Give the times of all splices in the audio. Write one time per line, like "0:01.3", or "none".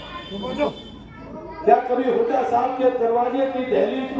none